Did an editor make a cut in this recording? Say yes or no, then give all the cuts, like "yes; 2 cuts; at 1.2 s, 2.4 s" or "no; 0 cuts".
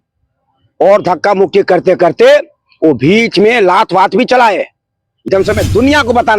yes; 1 cut; at 5.2 s